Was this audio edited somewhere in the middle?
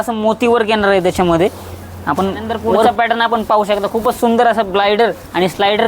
yes; 1 cut; at 2.9 s

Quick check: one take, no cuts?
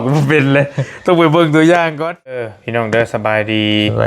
no; 1 cut; at 2.6 s

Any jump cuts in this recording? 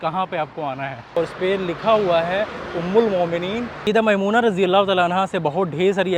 yes; 2 cuts; at 1.2 s, 3.7 s

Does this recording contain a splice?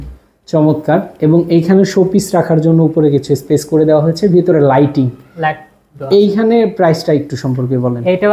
no; 0 cuts

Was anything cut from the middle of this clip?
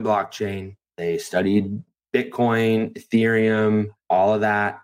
yes; 3 cuts; at 0.9 s, 1.9 s, 4.0 s

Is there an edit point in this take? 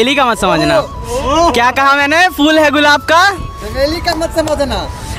no; 0 cuts

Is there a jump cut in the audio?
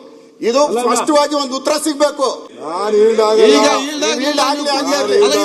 yes; 1 cut; at 2.4 s

